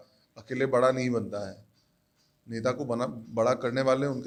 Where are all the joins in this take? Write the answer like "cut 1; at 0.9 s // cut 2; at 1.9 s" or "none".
none

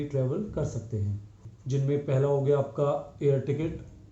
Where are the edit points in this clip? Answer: cut 1; at 1.5 s

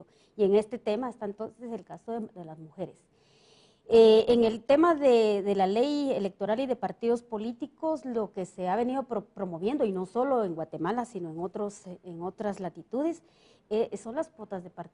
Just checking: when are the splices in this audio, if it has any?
cut 1; at 5.2 s

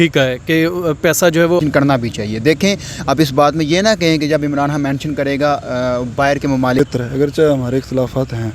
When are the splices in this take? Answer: cut 1; at 1.6 s // cut 2; at 6.9 s

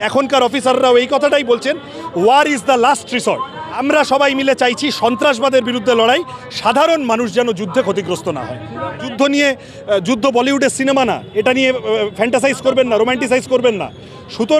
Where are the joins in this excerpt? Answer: cut 1; at 3.8 s // cut 2; at 9.1 s

